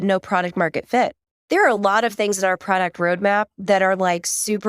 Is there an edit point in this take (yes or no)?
yes